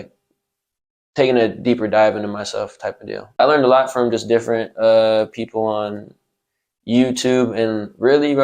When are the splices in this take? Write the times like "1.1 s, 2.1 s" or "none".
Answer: 3.4 s